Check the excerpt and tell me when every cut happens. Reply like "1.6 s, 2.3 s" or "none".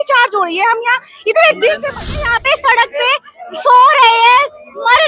2.0 s